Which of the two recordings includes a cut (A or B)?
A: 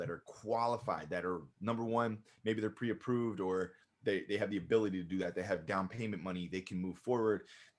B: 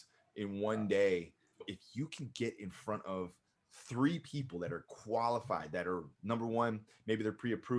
B